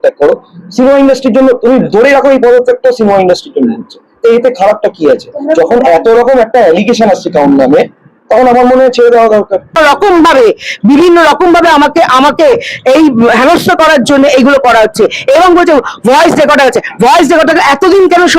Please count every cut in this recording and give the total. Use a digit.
1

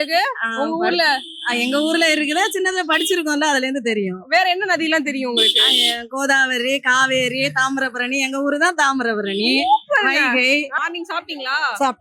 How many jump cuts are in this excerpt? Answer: 1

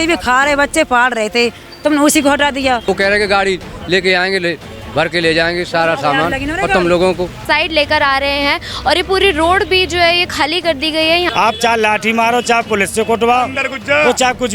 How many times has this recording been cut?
3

